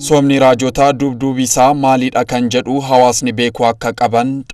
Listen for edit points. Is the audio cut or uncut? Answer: uncut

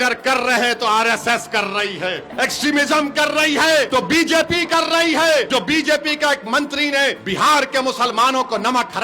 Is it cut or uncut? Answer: cut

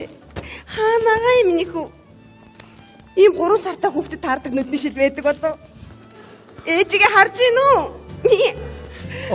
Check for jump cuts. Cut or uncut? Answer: cut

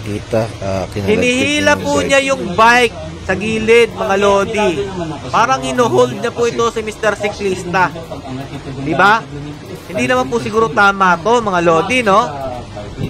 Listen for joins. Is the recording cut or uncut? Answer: uncut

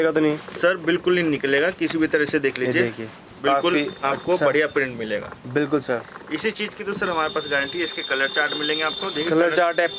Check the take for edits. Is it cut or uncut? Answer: uncut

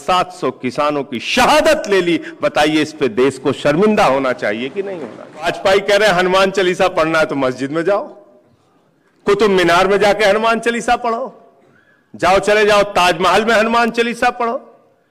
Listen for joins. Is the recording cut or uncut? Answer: cut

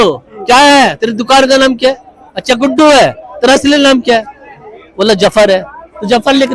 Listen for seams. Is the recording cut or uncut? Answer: uncut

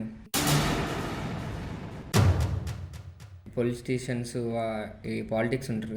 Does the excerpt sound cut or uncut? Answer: cut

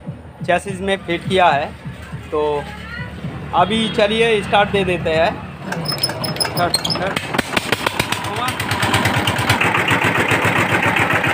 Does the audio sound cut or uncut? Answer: cut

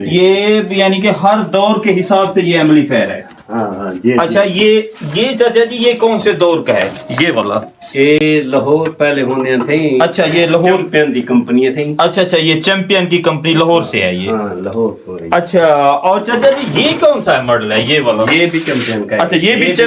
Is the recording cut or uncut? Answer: uncut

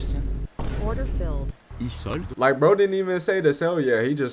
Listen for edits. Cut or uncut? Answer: uncut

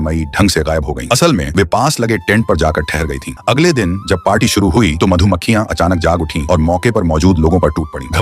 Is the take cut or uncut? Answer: cut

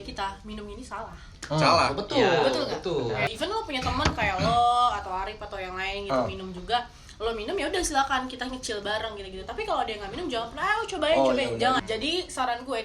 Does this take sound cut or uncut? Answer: cut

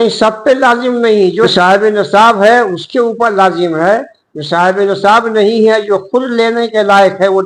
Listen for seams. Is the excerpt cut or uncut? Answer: cut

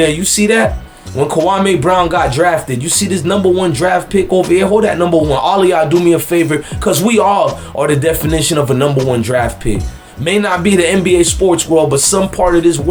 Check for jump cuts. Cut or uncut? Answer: uncut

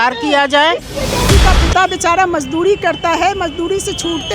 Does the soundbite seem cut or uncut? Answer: cut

